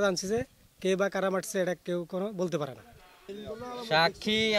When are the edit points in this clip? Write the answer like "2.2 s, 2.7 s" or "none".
3.3 s